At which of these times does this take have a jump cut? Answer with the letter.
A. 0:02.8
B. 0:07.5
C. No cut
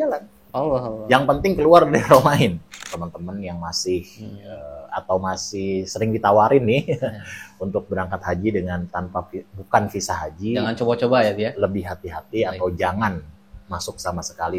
A